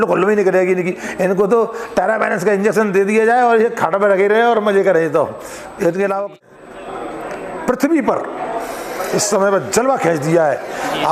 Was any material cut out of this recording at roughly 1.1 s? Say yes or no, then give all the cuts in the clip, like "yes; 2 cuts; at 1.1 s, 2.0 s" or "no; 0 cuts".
no; 1 cut; at 6.4 s